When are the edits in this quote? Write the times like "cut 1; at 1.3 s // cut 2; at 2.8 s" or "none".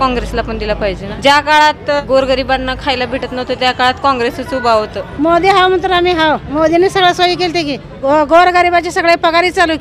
cut 1; at 1.1 s // cut 2; at 2.0 s // cut 3; at 5.0 s // cut 4; at 6.5 s // cut 5; at 7.9 s